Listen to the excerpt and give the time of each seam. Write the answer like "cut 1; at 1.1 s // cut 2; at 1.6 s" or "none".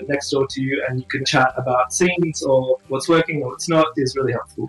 cut 1; at 1.3 s // cut 2; at 2.8 s // cut 3; at 3.9 s